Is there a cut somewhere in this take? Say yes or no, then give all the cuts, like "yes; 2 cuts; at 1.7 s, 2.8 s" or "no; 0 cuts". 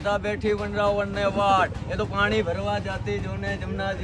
no; 0 cuts